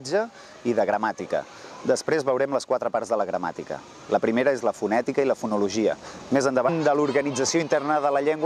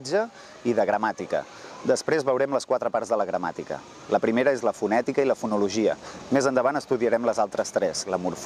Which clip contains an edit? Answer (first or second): second